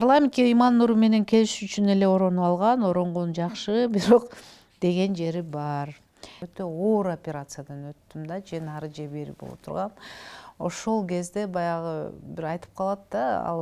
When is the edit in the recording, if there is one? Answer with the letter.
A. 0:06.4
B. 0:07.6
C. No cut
A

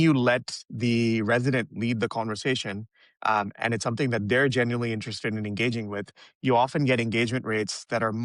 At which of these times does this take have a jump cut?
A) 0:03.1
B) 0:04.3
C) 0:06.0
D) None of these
D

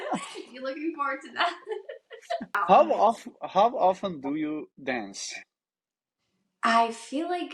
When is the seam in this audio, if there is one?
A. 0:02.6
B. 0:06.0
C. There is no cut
A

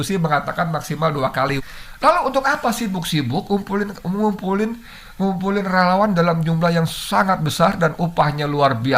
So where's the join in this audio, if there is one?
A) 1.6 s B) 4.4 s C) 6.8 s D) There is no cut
A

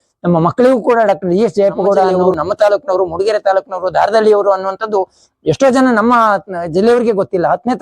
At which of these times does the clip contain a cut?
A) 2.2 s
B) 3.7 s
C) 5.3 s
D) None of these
A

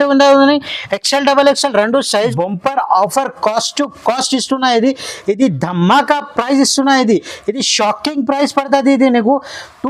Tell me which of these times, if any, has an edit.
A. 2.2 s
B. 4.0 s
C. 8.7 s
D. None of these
A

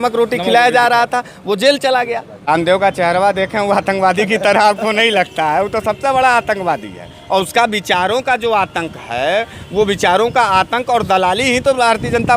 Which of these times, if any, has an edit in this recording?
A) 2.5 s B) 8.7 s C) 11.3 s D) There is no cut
A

